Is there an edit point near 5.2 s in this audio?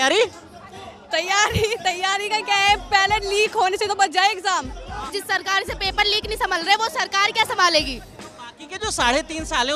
yes; 1 cut; at 5.2 s

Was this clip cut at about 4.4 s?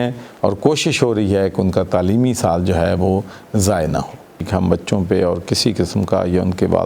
yes; 1 cut; at 4.4 s

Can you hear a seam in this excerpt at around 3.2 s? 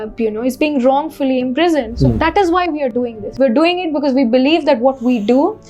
yes; 1 cut; at 3.2 s

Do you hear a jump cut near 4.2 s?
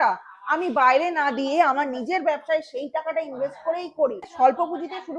yes; 1 cut; at 4.2 s

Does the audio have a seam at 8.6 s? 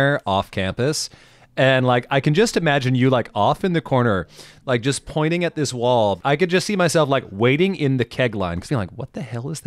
yes; 2 cuts; at 6.2 s, 8.6 s

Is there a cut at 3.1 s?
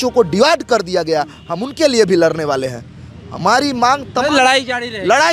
no; 0 cuts

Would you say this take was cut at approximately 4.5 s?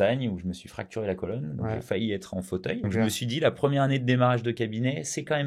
no; 1 cut; at 2.8 s

